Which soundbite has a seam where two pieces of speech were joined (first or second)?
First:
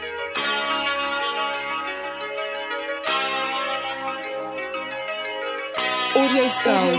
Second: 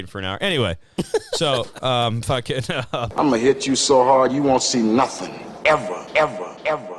second